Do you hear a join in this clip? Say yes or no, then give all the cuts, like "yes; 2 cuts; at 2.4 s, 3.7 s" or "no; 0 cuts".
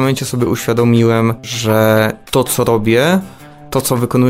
yes; 1 cut; at 1.5 s